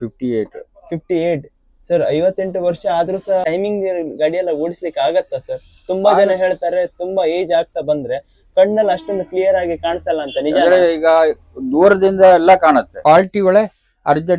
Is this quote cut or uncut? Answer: cut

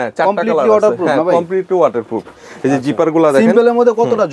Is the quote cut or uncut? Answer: uncut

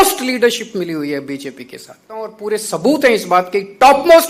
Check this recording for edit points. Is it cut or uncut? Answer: cut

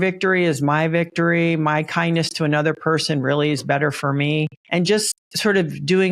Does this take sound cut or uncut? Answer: cut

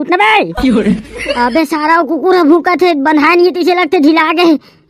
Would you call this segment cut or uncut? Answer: uncut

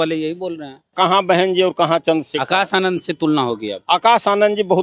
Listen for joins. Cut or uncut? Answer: cut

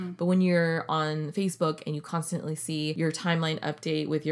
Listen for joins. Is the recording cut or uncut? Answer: cut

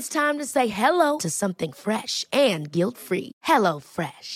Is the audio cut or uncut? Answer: uncut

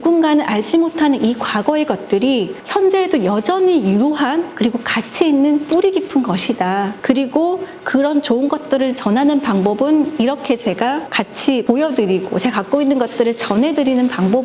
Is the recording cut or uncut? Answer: cut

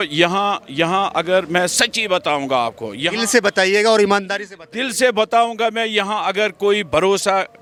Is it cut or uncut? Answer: uncut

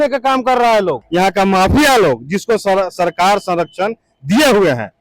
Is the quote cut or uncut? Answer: cut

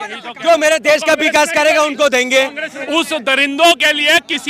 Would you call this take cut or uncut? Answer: cut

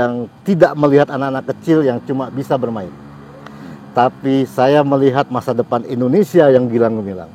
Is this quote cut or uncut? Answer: uncut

